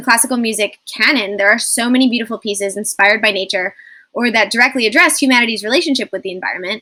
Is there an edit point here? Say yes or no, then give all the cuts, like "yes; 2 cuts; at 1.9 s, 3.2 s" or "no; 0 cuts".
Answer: no; 0 cuts